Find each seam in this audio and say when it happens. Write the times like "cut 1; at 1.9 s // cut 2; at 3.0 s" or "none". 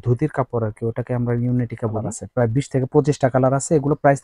cut 1; at 2.2 s